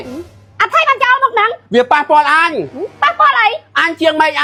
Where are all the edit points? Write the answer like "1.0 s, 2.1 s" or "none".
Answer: none